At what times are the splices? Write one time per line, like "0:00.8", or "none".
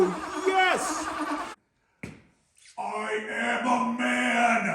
0:01.5